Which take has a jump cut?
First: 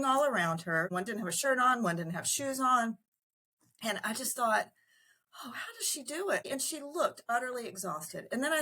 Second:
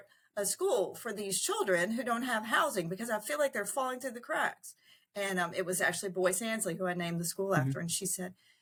first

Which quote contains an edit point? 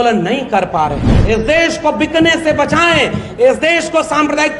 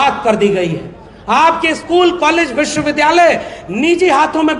first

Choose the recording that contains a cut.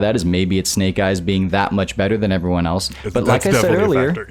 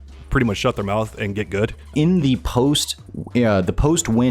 second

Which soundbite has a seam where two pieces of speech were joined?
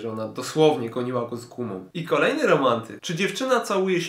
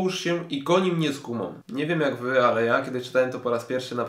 first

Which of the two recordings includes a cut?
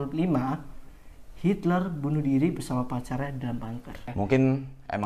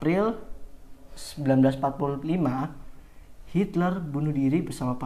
first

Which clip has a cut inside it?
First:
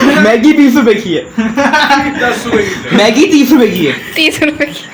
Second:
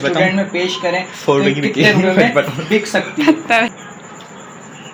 second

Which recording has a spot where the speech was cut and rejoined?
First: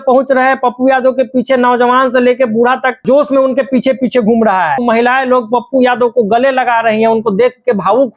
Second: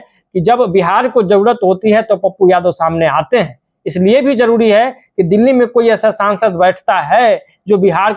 first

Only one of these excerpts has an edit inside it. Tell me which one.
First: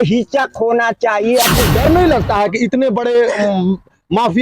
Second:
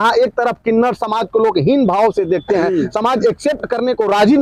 first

